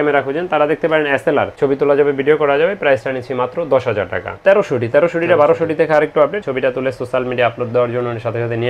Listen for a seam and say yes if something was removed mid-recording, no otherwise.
yes